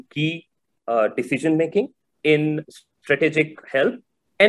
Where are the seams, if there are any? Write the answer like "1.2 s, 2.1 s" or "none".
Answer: 2.3 s, 3.6 s